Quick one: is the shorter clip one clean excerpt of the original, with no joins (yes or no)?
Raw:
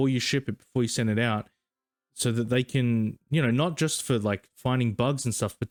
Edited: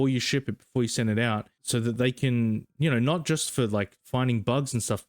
no